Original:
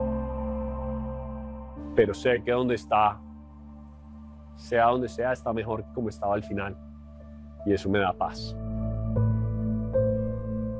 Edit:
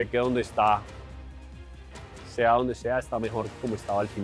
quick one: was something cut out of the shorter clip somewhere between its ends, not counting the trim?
no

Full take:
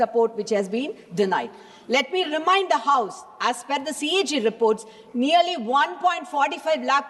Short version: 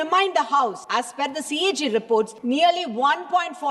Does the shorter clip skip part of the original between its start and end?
yes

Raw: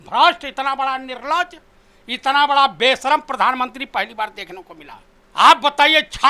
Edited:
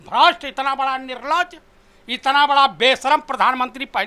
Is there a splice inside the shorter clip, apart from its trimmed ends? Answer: no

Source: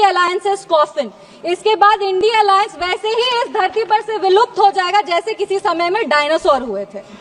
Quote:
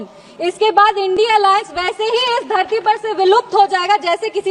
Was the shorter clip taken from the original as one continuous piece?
yes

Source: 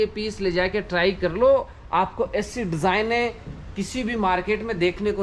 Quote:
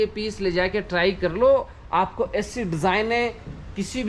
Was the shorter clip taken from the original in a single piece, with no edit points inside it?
yes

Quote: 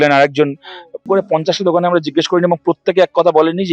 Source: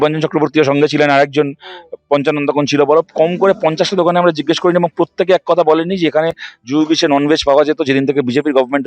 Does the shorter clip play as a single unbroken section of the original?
no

